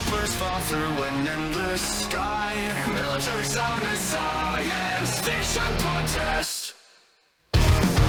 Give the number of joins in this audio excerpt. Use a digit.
0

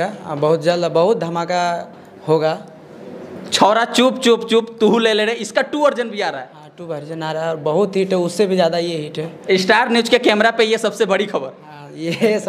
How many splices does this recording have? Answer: 0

